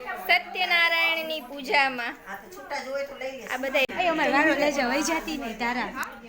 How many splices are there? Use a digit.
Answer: 1